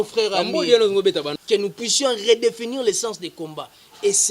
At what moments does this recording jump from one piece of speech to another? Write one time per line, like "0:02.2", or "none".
0:01.3